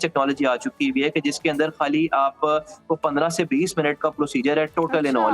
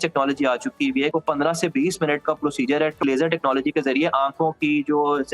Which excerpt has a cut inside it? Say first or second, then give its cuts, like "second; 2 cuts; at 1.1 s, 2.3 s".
second; 2 cuts; at 1.1 s, 3.0 s